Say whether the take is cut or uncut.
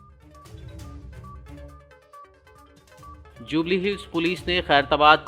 cut